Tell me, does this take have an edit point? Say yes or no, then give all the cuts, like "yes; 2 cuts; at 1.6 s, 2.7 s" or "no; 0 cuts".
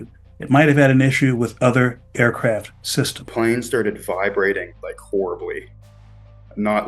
yes; 1 cut; at 3.2 s